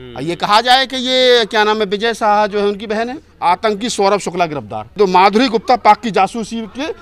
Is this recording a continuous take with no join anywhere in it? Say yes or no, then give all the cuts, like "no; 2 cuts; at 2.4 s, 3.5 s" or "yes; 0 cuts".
no; 2 cuts; at 3.2 s, 4.9 s